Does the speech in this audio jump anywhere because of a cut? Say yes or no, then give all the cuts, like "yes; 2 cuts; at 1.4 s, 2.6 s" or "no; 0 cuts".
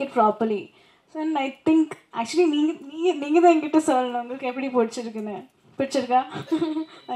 no; 0 cuts